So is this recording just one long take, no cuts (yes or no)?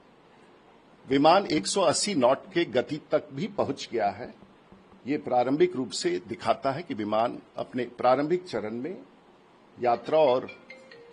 yes